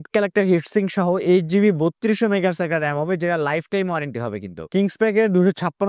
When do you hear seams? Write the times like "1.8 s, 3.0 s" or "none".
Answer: 4.6 s